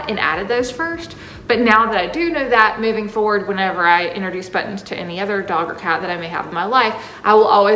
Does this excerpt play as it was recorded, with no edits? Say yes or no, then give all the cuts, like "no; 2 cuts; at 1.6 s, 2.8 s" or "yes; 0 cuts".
yes; 0 cuts